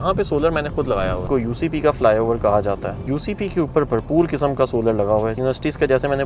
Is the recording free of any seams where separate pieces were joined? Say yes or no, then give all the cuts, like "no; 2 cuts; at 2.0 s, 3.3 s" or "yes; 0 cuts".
no; 3 cuts; at 1.2 s, 2.9 s, 5.4 s